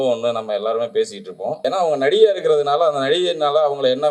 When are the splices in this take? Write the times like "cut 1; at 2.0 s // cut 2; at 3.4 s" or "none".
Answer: cut 1; at 1.6 s